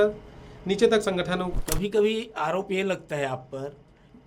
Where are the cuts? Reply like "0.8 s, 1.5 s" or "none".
1.5 s